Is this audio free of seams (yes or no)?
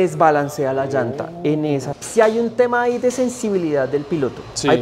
no